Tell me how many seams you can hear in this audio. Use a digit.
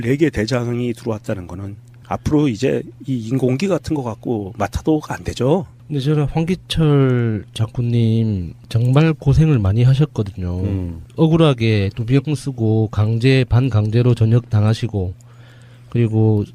1